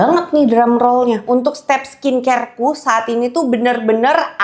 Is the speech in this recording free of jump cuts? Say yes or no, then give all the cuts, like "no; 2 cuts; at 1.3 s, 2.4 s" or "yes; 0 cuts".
no; 1 cut; at 1.2 s